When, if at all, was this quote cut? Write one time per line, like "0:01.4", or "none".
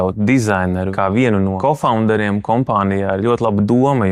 0:00.9
0:01.6